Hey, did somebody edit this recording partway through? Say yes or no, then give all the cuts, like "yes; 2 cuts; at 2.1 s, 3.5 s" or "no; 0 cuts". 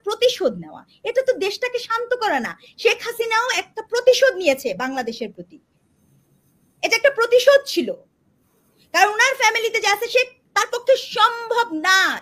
no; 0 cuts